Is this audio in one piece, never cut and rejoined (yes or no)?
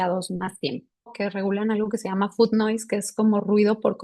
no